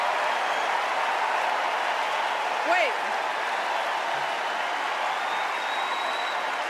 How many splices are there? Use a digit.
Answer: 1